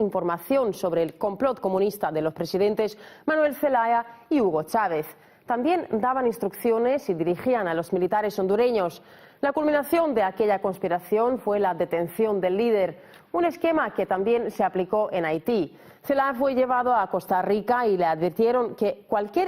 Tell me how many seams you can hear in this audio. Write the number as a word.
one